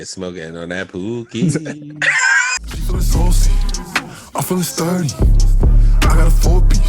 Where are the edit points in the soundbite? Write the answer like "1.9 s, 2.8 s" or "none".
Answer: 2.7 s